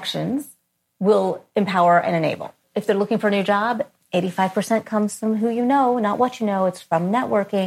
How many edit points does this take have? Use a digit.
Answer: 1